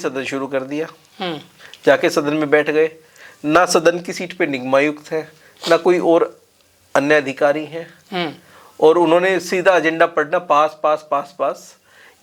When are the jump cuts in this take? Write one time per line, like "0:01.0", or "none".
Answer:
none